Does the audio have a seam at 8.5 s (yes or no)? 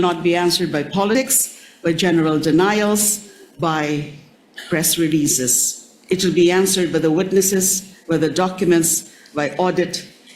no